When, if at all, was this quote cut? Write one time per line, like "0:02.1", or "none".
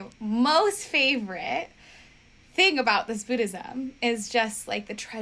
none